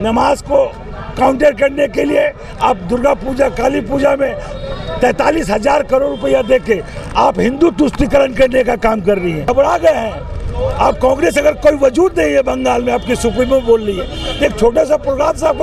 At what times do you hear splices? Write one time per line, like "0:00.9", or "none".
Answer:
0:09.5